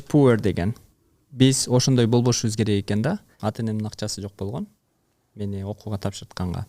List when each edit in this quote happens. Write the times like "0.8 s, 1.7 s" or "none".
3.3 s